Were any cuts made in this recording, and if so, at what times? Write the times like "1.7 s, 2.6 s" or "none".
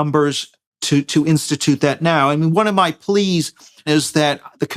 3.9 s